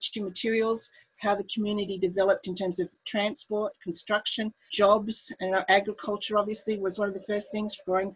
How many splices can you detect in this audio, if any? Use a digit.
2